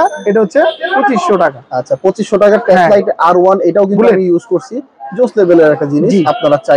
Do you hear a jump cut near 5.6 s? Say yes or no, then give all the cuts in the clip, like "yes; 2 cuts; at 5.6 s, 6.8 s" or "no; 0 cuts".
no; 0 cuts